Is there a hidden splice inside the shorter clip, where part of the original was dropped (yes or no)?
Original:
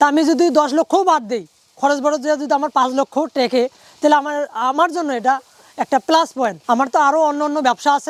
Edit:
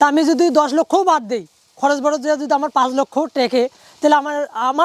no